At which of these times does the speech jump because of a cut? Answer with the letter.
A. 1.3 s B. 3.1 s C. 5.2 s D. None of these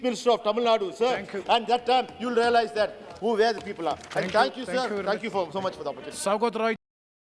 D